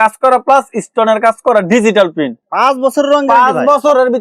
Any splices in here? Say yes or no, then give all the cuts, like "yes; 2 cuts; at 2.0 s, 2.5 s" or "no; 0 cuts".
yes; 1 cut; at 2.4 s